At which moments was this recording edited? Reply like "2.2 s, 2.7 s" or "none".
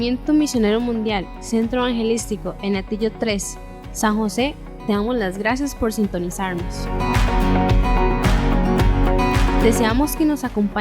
9.6 s